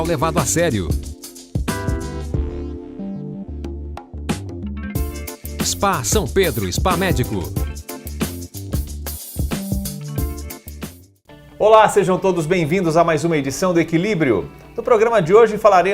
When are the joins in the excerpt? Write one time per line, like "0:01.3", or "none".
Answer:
0:11.0